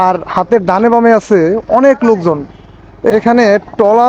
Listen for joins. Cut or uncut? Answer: cut